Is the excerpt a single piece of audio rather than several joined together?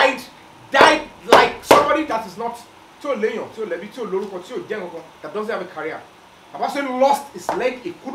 yes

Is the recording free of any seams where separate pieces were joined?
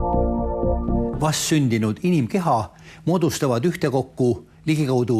no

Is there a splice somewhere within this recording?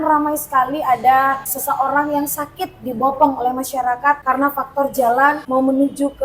yes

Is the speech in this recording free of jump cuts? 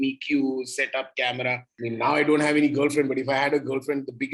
no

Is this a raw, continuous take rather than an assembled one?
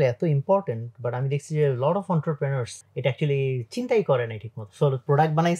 no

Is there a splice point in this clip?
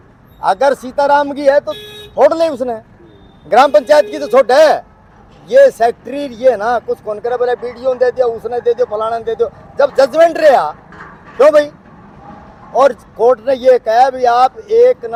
no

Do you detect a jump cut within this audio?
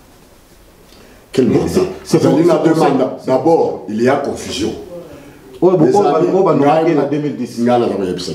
no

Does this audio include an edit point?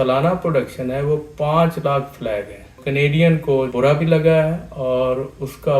yes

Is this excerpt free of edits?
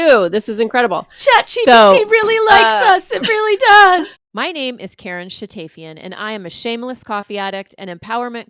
yes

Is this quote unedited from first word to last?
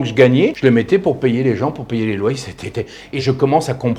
no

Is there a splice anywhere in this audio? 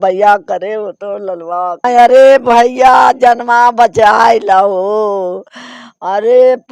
yes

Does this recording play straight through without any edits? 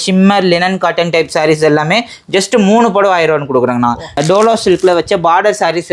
no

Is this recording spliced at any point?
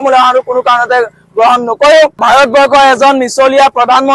yes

